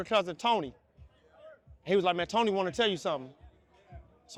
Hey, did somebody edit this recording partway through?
no; 0 cuts

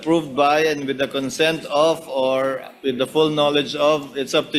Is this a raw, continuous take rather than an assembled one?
yes; 0 cuts

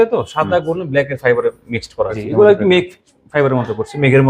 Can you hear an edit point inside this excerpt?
yes; 1 cut; at 2.3 s

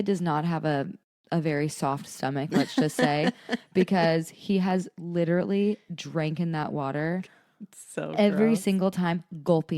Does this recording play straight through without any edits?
yes; 0 cuts

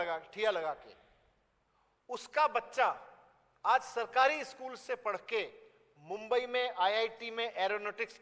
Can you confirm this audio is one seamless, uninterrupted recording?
yes; 0 cuts

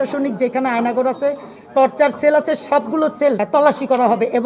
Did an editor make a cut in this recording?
yes; 1 cut; at 3.4 s

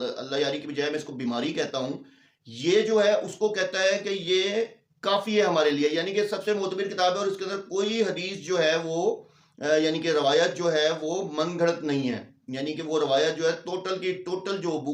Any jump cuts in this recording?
no; 0 cuts

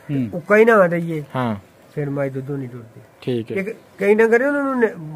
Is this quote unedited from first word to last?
no; 1 cut; at 3.5 s

